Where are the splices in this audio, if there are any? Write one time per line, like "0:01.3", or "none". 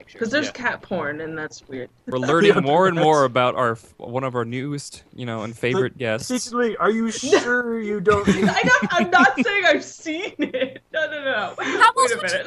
0:02.0